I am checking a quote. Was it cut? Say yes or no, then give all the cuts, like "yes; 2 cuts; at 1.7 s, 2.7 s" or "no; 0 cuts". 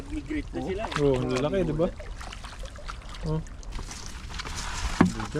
yes; 1 cut; at 3.8 s